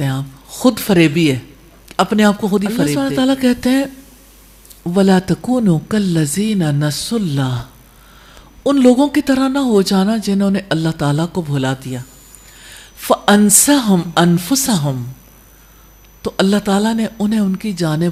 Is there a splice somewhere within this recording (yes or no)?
no